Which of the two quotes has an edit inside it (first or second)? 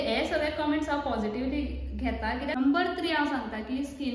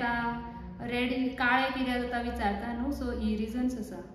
first